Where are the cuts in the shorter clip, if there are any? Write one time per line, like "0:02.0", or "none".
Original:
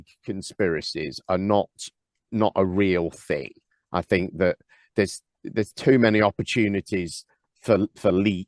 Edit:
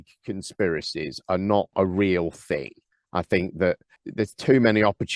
0:01.7
0:04.0